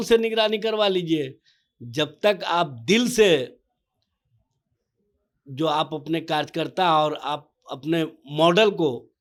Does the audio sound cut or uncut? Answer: uncut